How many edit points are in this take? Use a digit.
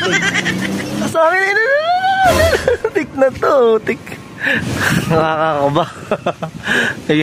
2